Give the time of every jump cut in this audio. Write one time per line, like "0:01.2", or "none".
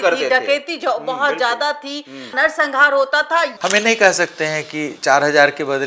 0:03.5